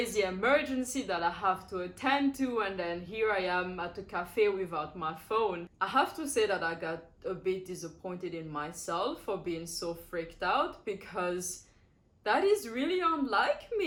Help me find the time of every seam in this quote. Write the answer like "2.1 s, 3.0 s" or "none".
none